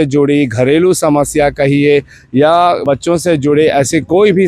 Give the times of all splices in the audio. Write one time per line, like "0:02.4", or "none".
none